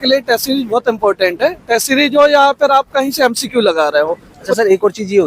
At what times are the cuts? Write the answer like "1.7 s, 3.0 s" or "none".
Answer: 4.4 s